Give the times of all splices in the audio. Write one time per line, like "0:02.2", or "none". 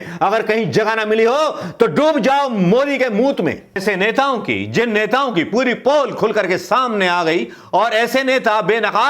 0:03.8